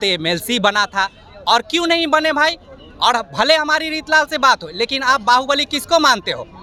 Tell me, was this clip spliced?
no; 0 cuts

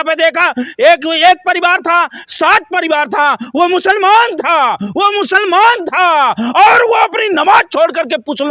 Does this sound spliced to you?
no; 0 cuts

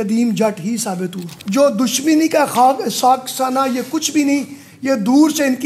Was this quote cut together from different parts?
yes; 1 cut; at 1.3 s

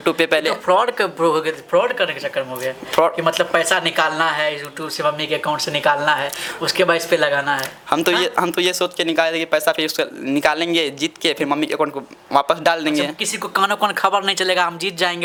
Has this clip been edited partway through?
no; 0 cuts

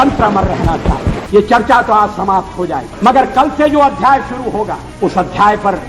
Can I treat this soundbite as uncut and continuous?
no; 3 cuts; at 1.2 s, 2.9 s, 4.8 s

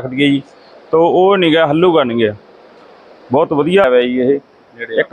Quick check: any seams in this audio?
yes; 1 cut; at 3.8 s

